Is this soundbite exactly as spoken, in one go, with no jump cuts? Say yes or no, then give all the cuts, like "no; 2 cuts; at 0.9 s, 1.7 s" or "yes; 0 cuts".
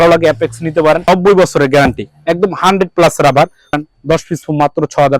no; 2 cuts; at 1.0 s, 3.8 s